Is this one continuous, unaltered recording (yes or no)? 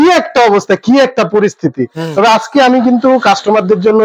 yes